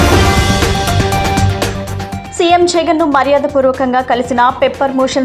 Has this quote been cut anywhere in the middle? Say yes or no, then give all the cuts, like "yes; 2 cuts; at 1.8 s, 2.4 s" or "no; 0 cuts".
yes; 1 cut; at 2.1 s